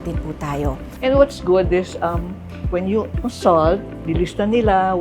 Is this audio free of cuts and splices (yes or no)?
no